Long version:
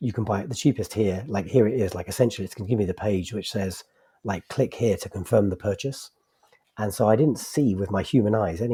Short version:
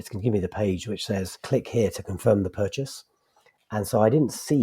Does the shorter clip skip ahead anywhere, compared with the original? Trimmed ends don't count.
yes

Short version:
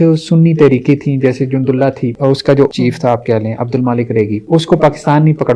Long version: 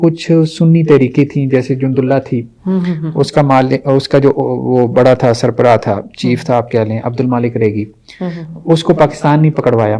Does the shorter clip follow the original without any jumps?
no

